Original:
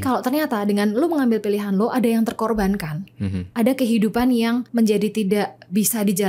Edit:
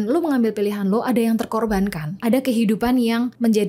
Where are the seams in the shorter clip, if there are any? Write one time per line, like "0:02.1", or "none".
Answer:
0:02.1